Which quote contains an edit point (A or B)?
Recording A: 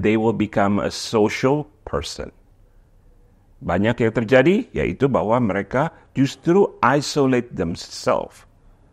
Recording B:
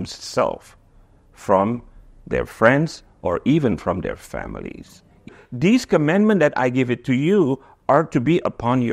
B